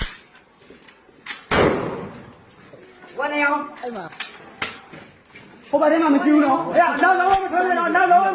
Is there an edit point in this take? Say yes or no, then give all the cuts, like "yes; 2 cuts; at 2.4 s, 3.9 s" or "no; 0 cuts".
no; 0 cuts